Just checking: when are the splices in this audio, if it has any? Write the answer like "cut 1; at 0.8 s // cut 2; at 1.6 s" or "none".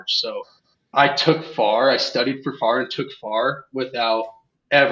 cut 1; at 0.9 s